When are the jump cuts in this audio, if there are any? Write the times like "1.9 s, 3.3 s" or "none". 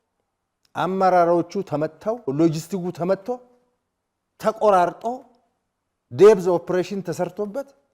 2.3 s